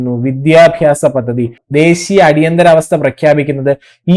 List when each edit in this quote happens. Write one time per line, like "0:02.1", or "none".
0:01.5